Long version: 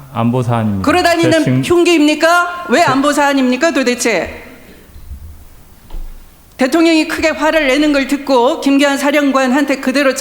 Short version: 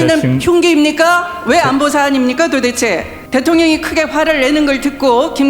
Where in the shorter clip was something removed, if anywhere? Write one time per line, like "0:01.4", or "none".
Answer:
0:03.1